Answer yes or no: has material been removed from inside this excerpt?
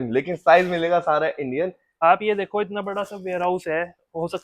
yes